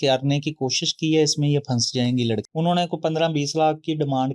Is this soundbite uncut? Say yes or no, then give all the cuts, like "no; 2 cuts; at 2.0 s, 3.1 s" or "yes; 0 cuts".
no; 1 cut; at 2.4 s